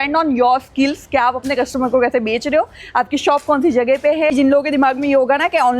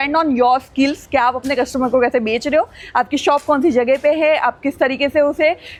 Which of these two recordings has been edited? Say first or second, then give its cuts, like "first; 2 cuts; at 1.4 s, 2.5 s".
first; 1 cut; at 4.3 s